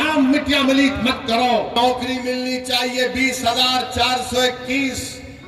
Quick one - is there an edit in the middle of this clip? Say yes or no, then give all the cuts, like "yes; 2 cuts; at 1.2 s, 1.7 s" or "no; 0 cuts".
yes; 1 cut; at 1.7 s